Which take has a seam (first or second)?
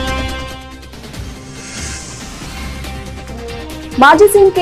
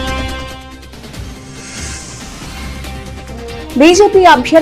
second